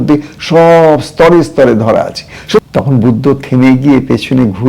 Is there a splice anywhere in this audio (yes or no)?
yes